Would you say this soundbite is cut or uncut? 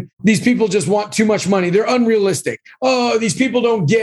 uncut